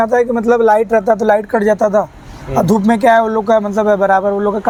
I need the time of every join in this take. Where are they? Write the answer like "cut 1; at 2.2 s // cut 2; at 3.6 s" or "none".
none

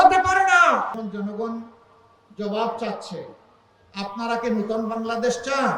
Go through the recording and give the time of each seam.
cut 1; at 1.0 s

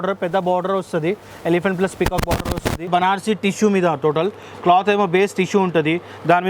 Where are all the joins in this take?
cut 1; at 2.9 s

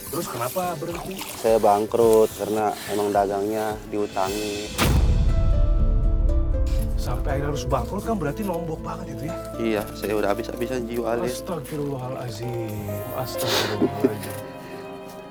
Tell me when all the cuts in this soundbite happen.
none

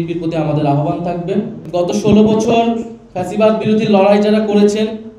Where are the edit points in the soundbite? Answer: cut 1; at 1.6 s

